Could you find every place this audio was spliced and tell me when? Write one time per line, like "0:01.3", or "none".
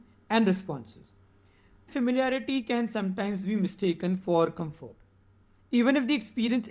0:01.9